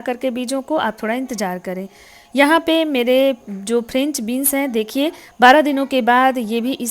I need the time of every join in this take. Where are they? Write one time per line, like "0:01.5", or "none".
none